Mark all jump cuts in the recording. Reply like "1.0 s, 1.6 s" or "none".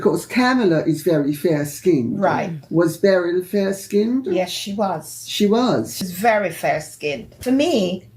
6.0 s, 7.3 s